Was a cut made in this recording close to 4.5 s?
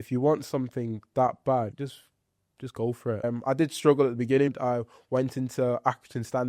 yes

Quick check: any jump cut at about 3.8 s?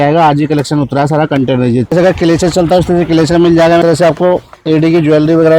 yes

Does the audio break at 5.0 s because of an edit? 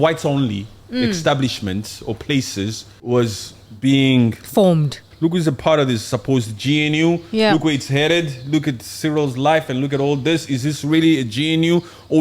yes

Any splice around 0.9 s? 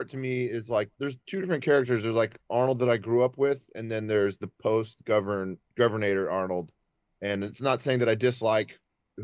yes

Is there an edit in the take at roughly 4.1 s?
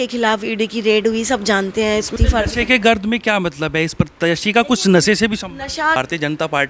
no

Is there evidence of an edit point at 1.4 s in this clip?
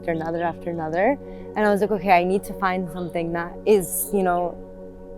yes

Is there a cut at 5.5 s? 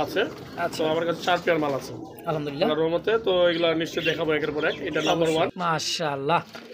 yes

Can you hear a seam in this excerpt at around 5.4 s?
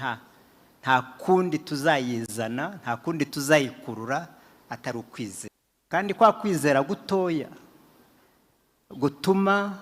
yes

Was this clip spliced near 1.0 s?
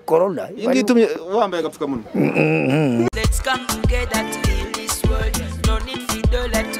no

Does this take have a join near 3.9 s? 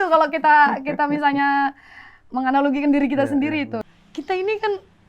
yes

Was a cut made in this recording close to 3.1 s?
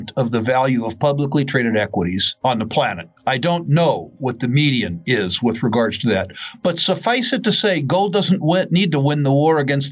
yes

